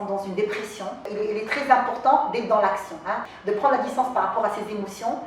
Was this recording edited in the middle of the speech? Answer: yes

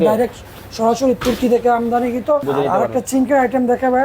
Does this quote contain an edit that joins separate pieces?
yes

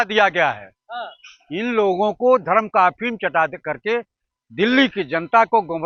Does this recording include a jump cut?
no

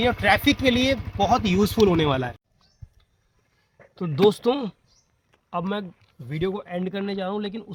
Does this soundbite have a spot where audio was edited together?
no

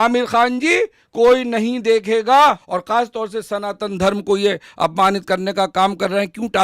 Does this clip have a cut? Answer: yes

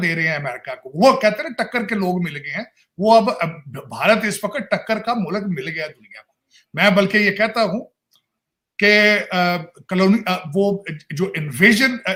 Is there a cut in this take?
no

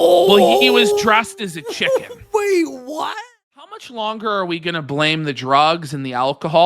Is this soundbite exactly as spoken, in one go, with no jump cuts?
no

